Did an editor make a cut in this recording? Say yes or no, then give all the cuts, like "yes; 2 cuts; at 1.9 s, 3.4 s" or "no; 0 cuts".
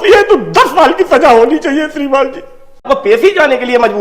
yes; 1 cut; at 2.8 s